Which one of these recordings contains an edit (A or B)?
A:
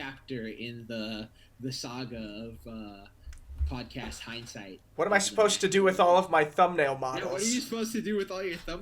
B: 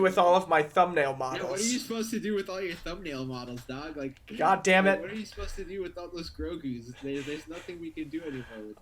A